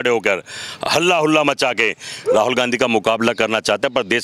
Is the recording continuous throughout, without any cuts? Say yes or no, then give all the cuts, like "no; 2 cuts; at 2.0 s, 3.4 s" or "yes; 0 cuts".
yes; 0 cuts